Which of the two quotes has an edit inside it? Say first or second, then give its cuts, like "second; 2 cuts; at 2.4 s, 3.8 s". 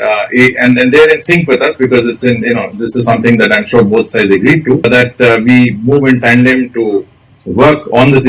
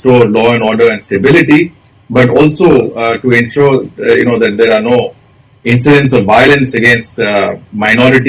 first; 1 cut; at 4.9 s